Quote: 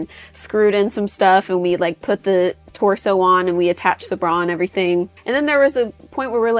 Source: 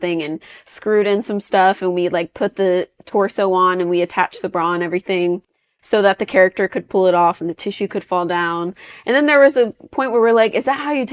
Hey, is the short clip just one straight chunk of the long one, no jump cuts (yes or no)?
no